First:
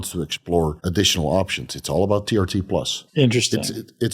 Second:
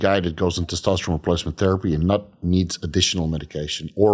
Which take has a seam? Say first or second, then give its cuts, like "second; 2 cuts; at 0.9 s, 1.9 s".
first; 2 cuts; at 0.8 s, 3.0 s